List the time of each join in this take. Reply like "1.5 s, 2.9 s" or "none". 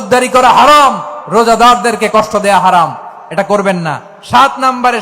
none

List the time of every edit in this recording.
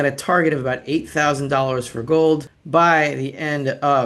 2.5 s

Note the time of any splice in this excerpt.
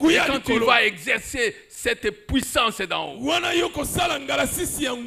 none

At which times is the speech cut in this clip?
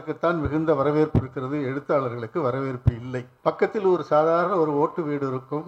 3.3 s

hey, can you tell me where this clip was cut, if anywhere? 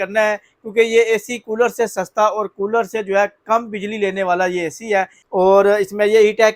5.2 s

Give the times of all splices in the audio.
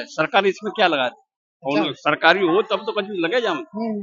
none

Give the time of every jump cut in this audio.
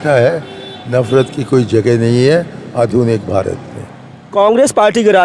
none

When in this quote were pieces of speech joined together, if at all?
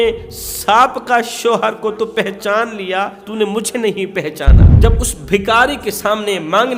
3.2 s, 4.7 s

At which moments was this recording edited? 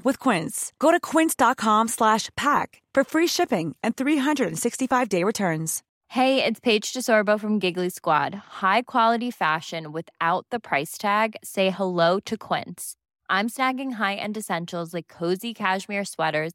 6.0 s

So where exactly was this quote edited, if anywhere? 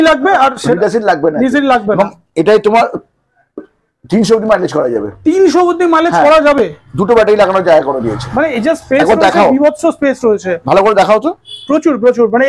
none

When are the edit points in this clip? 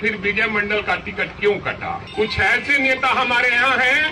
2.0 s

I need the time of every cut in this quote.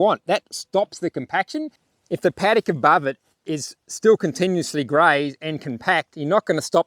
1.8 s

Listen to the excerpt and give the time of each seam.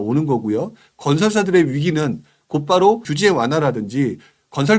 3.1 s

